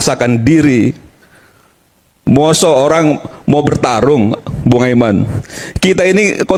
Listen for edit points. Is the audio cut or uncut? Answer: uncut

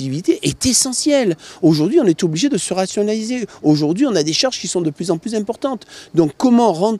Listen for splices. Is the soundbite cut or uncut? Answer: uncut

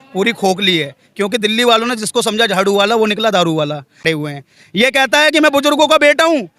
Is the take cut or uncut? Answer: cut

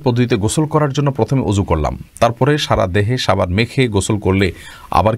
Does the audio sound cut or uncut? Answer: uncut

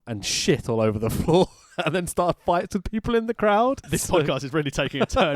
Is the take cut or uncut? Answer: cut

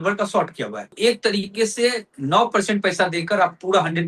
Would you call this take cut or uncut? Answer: cut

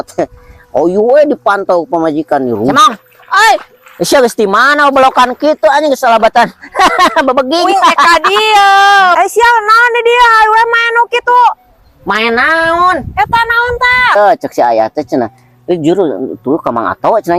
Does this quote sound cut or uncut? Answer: cut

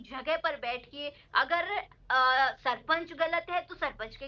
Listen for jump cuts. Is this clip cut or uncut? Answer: uncut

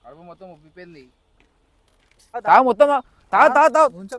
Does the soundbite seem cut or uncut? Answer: cut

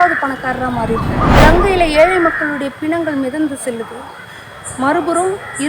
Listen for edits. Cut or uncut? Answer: cut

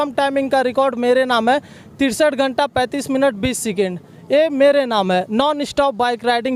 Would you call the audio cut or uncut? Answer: uncut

